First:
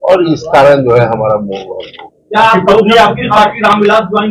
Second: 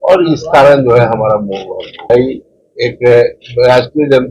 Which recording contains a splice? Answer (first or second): second